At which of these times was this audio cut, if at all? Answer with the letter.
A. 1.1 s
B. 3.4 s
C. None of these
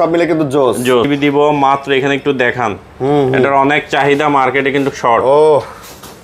A